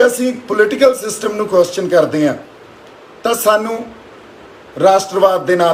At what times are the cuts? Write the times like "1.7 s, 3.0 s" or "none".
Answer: none